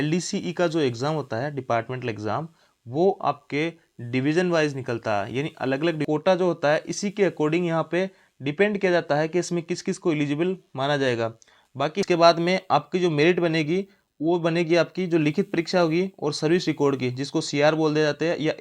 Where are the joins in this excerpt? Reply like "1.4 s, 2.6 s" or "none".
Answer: 6.0 s, 12.1 s

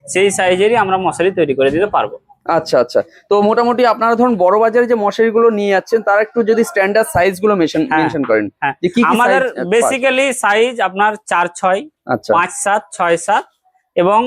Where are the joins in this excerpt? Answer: none

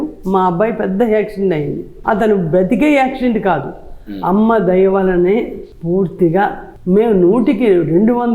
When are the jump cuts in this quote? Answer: none

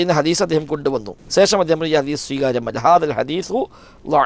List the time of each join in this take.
1.1 s

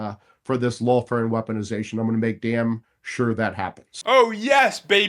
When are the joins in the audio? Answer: 3.9 s

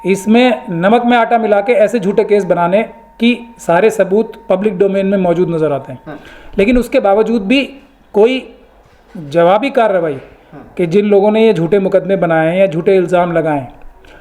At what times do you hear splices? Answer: none

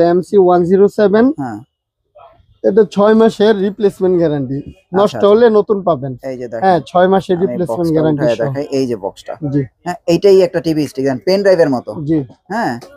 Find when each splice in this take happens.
none

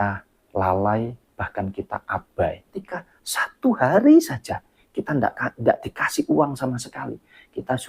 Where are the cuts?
2.8 s

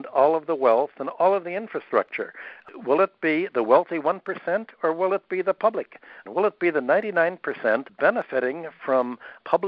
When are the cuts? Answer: 6.2 s, 7.9 s

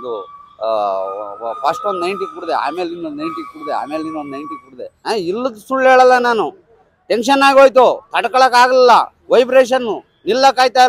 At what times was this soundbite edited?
4.9 s

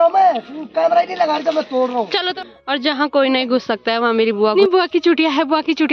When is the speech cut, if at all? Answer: 2.3 s, 4.5 s

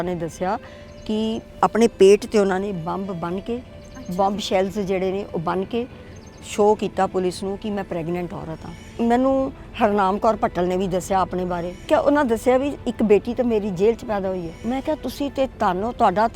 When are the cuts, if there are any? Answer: 8.9 s, 11.9 s, 14.5 s

